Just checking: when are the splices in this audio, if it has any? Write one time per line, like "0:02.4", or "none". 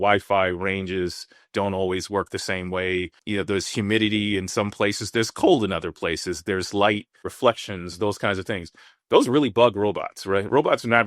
0:03.2